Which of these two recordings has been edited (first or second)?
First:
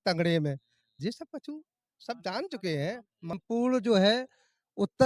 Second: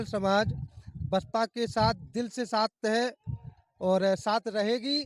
first